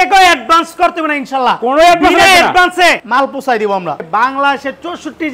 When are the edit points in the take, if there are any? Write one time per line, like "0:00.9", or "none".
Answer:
0:03.0
0:04.0